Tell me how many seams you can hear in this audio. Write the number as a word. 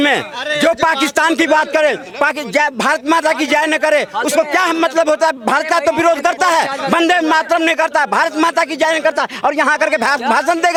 zero